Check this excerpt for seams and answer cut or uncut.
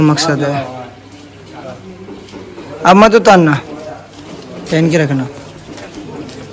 uncut